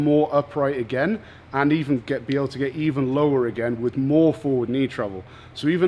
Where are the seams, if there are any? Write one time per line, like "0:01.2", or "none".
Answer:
none